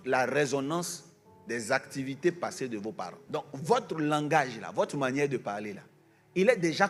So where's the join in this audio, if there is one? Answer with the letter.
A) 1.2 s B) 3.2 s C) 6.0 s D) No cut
B